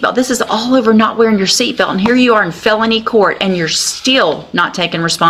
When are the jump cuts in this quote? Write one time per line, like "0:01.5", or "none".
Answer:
none